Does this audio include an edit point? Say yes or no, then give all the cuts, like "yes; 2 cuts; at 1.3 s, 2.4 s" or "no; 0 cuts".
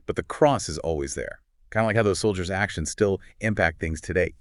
no; 0 cuts